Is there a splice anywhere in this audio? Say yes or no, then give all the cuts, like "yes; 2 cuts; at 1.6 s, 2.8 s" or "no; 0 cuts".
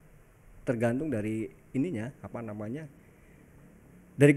no; 0 cuts